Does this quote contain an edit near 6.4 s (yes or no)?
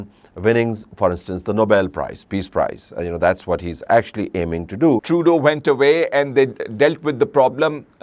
no